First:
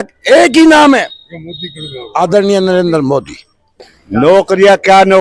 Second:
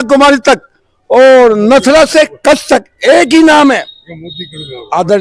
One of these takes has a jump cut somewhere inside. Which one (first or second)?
first